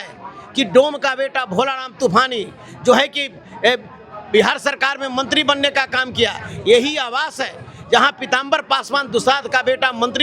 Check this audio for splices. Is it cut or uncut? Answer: uncut